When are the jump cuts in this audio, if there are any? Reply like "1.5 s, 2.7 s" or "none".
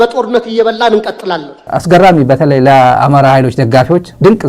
1.6 s

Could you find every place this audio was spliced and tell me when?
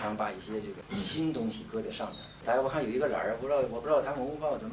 0.8 s, 2.4 s

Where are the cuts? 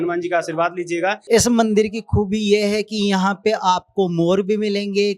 1.2 s

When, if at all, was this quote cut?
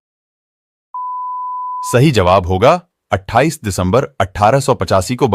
1.9 s

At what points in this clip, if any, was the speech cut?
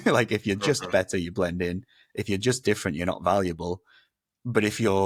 none

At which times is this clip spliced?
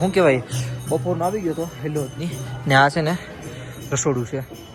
none

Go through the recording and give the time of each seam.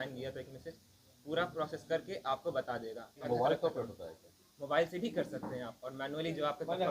3.3 s

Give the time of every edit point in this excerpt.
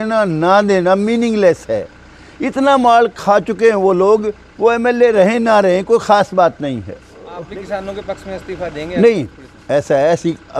7.4 s

